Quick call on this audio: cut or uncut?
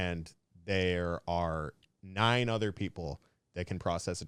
uncut